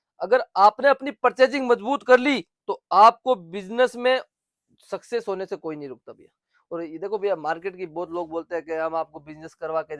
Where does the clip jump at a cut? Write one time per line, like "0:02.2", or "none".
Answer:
none